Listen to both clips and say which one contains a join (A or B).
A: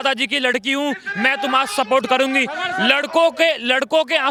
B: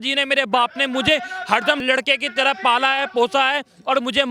B